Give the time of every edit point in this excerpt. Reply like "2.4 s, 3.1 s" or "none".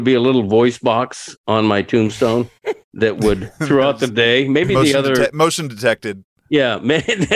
2.6 s